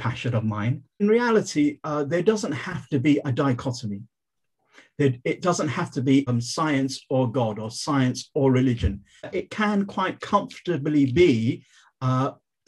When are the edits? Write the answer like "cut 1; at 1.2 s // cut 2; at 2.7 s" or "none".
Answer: cut 1; at 1.0 s // cut 2; at 6.3 s // cut 3; at 9.3 s